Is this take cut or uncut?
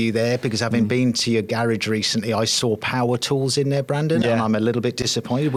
uncut